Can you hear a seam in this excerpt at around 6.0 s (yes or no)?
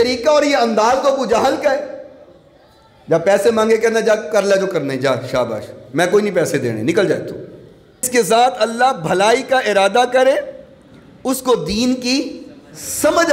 no